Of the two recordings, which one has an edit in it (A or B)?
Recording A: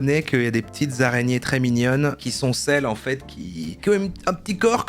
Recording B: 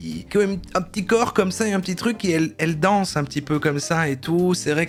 A